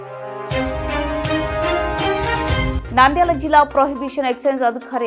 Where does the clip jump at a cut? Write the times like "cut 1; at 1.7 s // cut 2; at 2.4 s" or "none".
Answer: cut 1; at 2.8 s